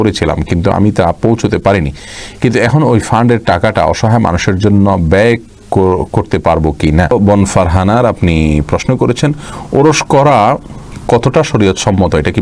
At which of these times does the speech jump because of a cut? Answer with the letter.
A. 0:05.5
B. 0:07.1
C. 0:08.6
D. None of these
B